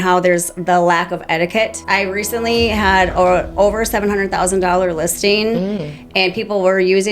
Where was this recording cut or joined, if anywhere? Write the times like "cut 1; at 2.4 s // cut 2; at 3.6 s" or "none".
cut 1; at 1.8 s